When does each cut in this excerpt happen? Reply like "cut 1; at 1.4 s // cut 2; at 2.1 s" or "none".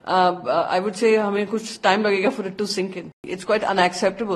cut 1; at 3.3 s